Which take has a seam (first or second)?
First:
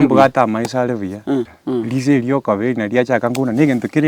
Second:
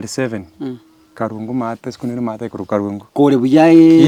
first